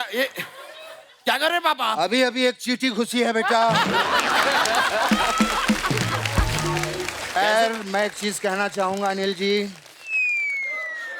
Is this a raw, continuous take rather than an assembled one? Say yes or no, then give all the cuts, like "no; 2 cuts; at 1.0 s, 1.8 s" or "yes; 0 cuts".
no; 1 cut; at 7.4 s